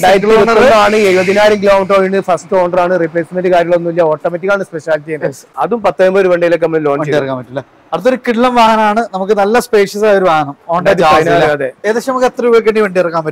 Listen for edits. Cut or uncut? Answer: cut